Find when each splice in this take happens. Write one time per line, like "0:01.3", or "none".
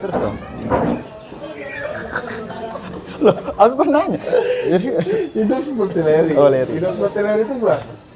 0:02.8